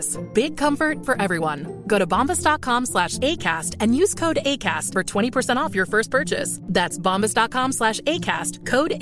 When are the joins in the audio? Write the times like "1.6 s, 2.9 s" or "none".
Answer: none